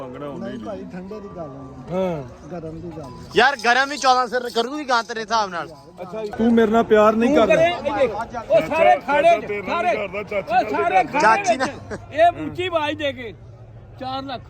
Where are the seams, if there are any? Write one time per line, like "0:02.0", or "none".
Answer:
0:06.3